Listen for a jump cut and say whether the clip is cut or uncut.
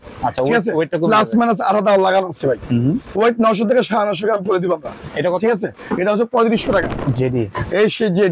cut